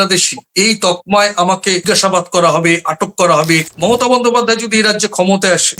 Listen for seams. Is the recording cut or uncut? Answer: cut